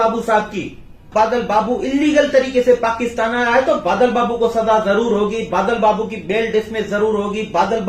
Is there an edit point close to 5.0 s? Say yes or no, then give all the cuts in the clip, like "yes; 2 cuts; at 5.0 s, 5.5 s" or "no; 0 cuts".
no; 1 cut; at 1.1 s